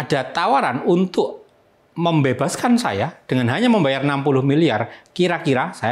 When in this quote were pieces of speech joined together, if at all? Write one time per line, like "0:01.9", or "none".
none